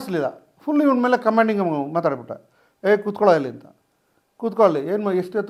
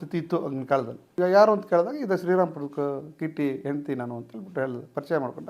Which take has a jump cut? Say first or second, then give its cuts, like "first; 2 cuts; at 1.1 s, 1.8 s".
second; 1 cut; at 1.1 s